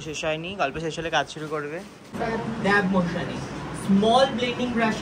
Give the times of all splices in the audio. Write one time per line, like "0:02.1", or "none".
0:02.1